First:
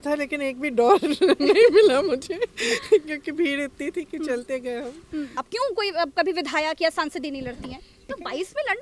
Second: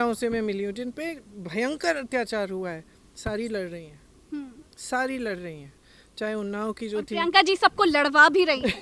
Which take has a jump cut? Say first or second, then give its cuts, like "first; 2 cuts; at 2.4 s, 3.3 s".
first; 2 cuts; at 5.4 s, 8.0 s